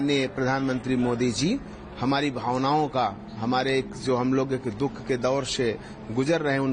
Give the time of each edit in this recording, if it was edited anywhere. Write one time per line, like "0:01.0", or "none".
none